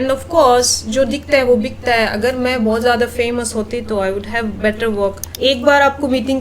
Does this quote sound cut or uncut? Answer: cut